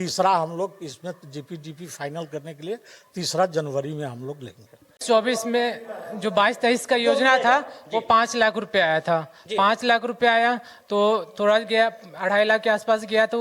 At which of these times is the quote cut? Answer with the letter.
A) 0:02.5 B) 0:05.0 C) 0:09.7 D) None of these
B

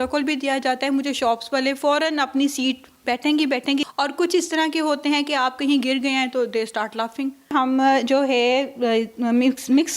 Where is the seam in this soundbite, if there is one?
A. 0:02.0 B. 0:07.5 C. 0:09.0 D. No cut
B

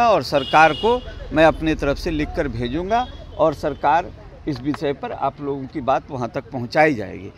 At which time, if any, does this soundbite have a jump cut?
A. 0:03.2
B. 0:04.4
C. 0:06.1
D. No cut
D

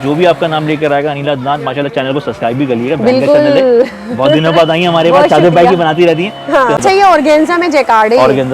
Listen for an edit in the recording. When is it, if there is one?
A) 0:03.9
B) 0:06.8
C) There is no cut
B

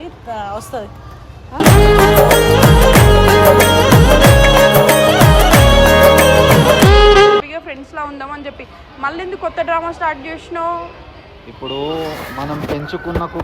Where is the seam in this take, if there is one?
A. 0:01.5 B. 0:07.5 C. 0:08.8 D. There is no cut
B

